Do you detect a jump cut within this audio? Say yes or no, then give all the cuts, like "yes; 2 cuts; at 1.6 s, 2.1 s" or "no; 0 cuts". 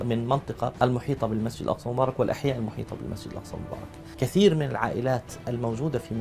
yes; 1 cut; at 4.1 s